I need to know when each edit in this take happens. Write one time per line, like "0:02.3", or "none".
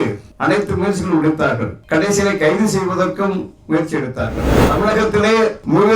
0:04.6